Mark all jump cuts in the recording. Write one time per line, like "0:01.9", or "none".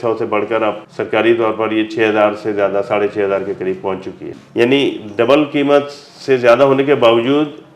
0:00.9
0:04.3